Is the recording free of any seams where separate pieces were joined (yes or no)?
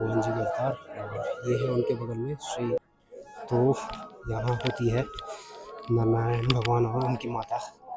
no